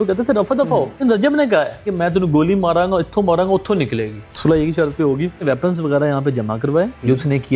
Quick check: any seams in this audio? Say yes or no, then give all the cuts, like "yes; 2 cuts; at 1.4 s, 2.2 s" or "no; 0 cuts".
yes; 2 cuts; at 1.0 s, 4.3 s